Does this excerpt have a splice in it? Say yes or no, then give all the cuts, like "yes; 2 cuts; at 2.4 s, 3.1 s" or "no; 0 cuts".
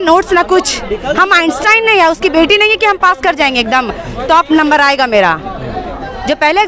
no; 0 cuts